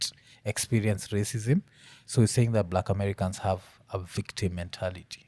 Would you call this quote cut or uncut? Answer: uncut